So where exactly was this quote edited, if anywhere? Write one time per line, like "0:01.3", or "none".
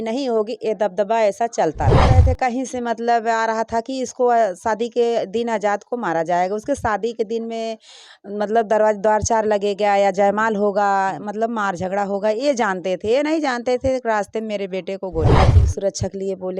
0:02.1
0:15.4